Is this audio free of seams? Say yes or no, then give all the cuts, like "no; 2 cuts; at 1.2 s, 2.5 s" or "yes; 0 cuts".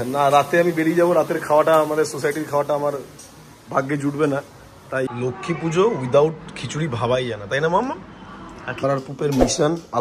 no; 2 cuts; at 5.1 s, 8.8 s